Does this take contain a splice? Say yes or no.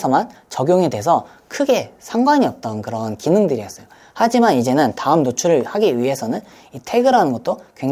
no